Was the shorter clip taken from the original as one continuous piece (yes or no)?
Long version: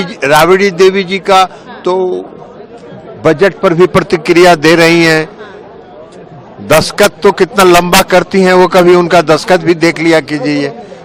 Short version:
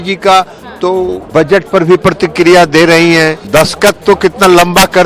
no